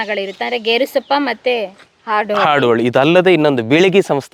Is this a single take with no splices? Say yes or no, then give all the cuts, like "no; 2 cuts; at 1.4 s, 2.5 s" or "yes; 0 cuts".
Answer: yes; 0 cuts